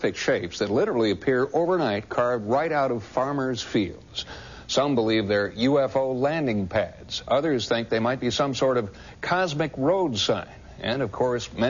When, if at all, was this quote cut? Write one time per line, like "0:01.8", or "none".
none